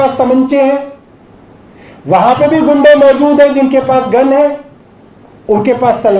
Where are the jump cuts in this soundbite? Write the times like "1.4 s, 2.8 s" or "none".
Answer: none